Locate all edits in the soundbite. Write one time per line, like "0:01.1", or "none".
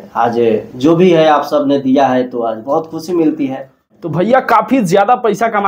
0:04.0